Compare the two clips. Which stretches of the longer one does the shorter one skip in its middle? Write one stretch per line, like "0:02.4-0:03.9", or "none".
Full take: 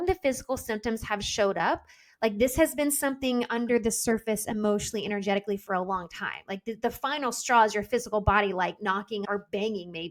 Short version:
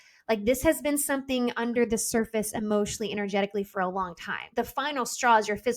0:06.3-0:06.7